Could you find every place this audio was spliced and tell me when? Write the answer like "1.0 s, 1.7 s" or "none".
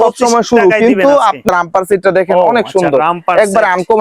1.5 s